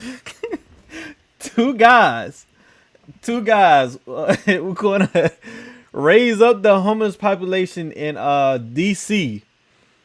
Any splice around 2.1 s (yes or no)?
no